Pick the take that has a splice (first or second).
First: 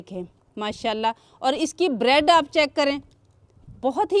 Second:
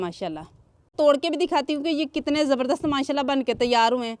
second